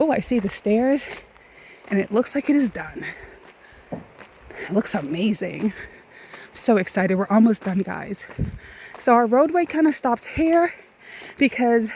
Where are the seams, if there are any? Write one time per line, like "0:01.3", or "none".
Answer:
none